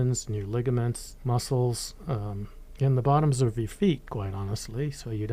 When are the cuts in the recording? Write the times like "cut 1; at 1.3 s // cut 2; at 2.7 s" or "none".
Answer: cut 1; at 1.1 s